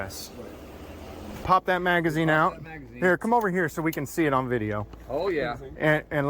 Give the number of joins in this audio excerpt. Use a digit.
1